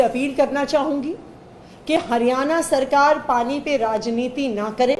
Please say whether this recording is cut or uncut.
uncut